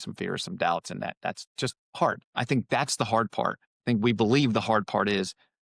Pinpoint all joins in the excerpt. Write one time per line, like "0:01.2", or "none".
0:02.2
0:03.7